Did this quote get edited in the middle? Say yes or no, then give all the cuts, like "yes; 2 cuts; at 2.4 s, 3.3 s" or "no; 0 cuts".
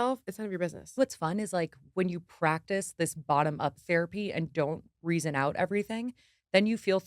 yes; 1 cut; at 1.0 s